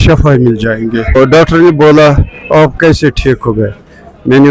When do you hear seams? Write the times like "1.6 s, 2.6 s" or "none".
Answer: 1.2 s

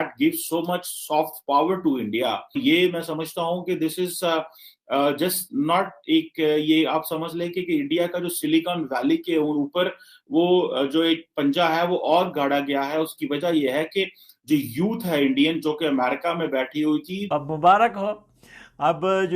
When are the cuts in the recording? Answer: 2.6 s, 17.3 s

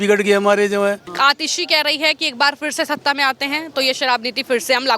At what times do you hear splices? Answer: 1.1 s

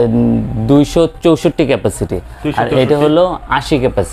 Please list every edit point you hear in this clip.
none

